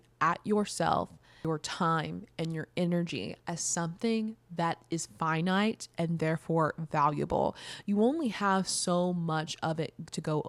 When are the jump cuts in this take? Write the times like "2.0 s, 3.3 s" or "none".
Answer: none